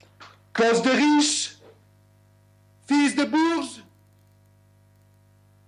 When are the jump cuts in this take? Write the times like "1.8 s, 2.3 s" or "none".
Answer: none